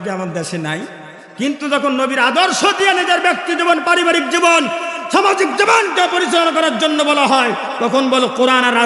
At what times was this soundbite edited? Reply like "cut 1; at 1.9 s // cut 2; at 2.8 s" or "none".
none